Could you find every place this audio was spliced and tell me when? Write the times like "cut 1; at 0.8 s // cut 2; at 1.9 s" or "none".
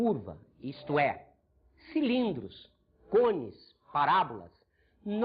cut 1; at 3.6 s